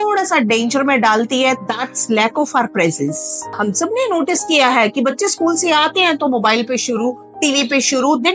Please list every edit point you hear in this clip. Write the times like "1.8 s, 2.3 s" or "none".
1.6 s, 3.5 s